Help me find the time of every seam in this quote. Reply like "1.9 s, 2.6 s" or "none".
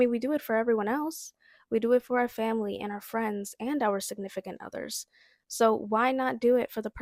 none